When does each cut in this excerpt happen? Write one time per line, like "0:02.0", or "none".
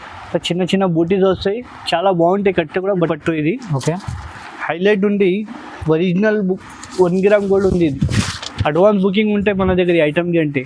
0:03.1